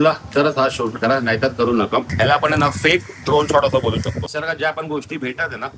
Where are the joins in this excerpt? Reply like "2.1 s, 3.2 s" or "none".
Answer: 2.1 s, 4.3 s